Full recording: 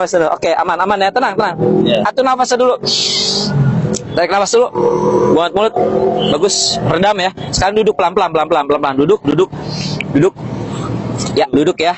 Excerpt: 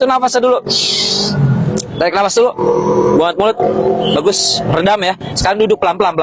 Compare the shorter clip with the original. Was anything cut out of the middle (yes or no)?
no